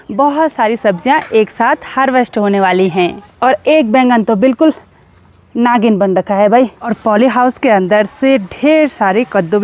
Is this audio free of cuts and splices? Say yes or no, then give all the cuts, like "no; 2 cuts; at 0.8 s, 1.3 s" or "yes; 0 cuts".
no; 2 cuts; at 3.2 s, 6.9 s